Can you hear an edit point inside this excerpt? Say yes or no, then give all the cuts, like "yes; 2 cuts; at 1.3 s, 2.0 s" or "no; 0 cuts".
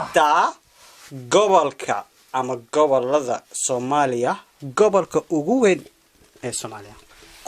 no; 0 cuts